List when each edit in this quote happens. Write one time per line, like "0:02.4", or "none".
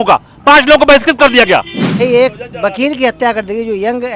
0:02.0